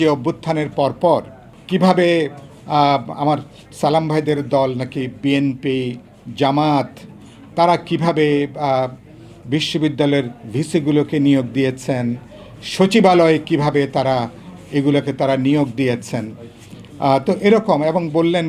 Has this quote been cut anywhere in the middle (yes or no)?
no